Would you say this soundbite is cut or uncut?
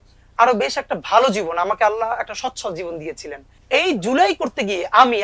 cut